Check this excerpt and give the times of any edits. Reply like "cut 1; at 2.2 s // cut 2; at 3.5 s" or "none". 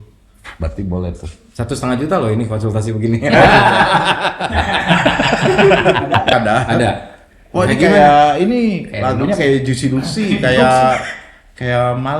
cut 1; at 6.3 s